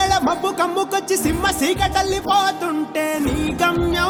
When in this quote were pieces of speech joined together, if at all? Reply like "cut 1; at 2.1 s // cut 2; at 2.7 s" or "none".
none